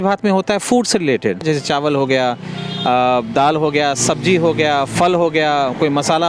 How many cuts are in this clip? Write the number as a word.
one